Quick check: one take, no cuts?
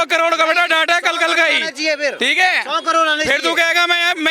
yes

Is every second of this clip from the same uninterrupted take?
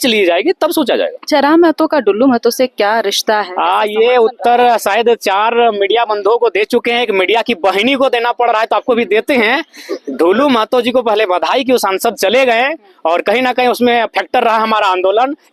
yes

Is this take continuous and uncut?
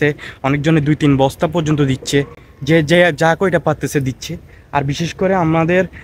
yes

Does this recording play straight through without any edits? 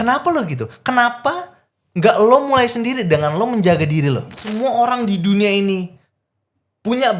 no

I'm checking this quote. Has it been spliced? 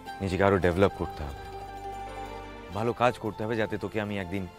yes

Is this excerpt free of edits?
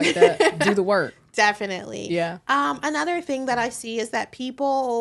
yes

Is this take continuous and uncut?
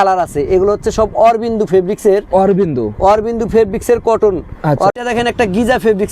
no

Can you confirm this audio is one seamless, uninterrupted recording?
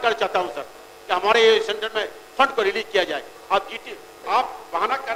yes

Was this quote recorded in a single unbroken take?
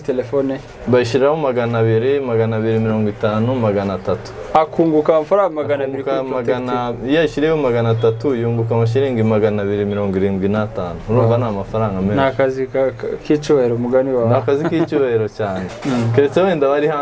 no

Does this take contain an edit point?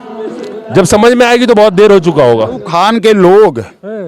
yes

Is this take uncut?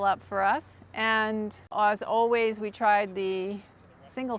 no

